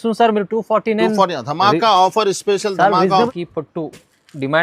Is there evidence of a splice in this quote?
yes; 1 cut; at 3.3 s

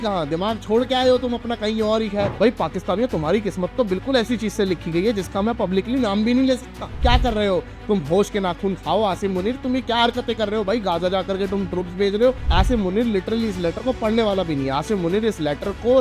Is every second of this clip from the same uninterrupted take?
no; 3 cuts; at 2.3 s, 7.0 s, 12.5 s

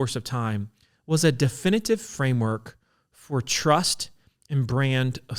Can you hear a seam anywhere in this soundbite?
no; 0 cuts

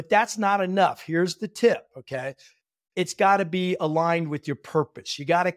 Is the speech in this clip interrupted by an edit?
no; 0 cuts

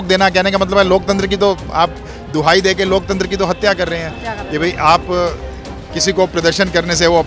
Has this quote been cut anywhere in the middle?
no; 0 cuts

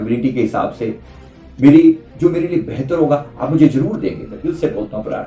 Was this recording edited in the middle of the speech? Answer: yes; 1 cut; at 4.3 s

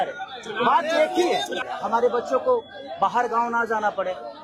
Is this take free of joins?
no; 1 cut; at 1.6 s

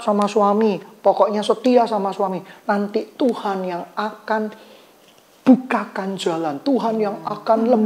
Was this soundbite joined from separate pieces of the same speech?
no; 0 cuts

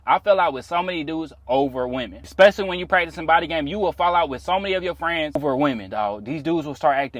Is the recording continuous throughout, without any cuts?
no; 2 cuts; at 2.2 s, 5.4 s

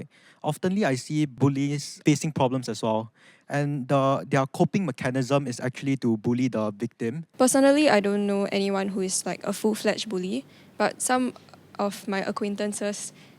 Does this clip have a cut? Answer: yes; 2 cuts; at 1.3 s, 7.2 s

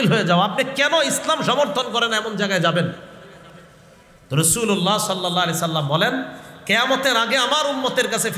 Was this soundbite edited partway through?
no; 0 cuts

